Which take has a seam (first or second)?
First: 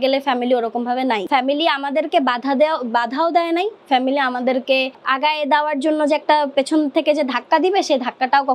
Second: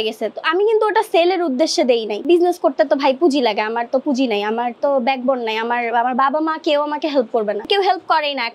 second